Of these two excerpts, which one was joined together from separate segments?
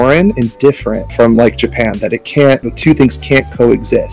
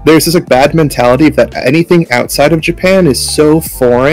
first; 2 cuts; at 1.1 s, 2.7 s

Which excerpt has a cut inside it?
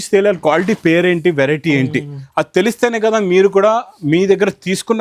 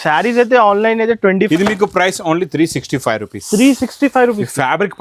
second; 1 cut; at 1.5 s

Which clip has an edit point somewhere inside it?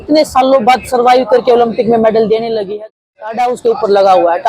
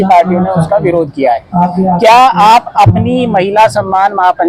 first; 1 cut; at 2.7 s

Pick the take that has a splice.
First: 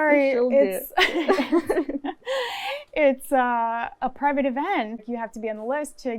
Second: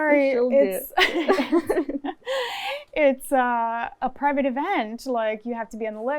first; 1 cut; at 5.0 s

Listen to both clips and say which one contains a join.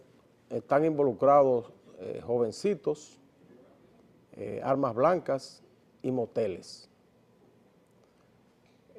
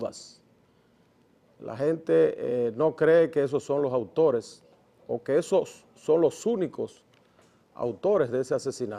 second; 1 cut; at 8.0 s

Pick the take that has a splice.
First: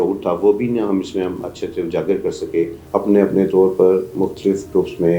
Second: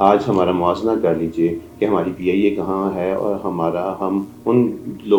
first; 2 cuts; at 2.8 s, 4.1 s

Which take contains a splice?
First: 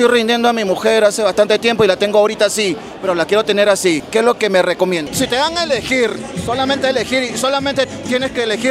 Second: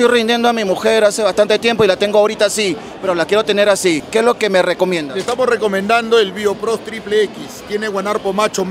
first; 1 cut; at 5.1 s

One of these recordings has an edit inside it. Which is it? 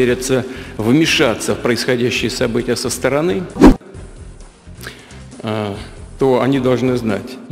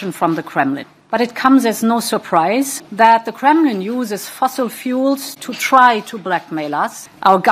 second; 2 cuts; at 0.9 s, 2.8 s

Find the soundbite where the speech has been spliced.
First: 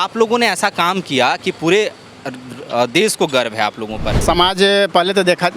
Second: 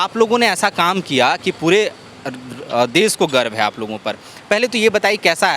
first; 1 cut; at 4.1 s

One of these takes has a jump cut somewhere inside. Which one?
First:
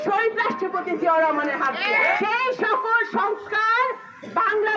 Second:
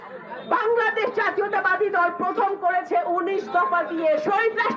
first; 1 cut; at 2.2 s

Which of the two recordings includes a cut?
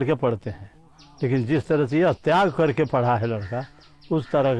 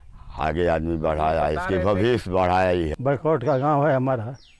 second; 1 cut; at 2.9 s

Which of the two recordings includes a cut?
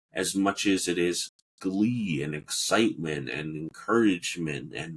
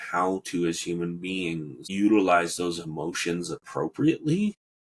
second; 1 cut; at 1.8 s

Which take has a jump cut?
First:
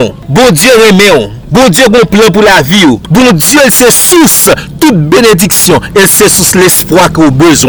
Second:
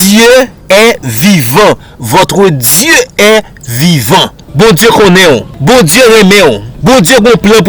second; 1 cut; at 4.4 s

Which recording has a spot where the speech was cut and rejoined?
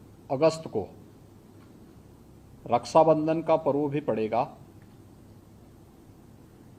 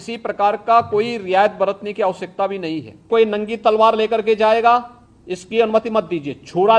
second; 1 cut; at 3.1 s

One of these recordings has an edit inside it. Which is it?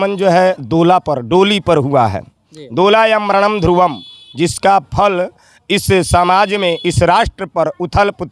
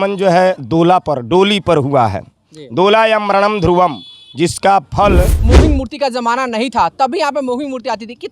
second; 1 cut; at 5.4 s

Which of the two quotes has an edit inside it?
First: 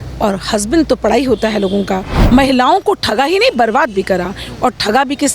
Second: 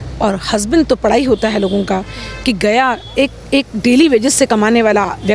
first; 1 cut; at 2.1 s

